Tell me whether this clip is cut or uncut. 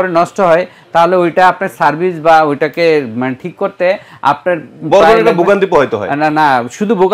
uncut